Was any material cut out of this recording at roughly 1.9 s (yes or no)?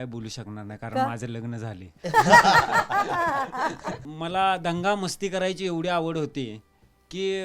no